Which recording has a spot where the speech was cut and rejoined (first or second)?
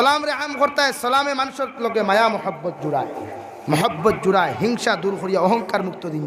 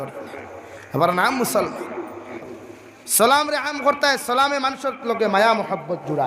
second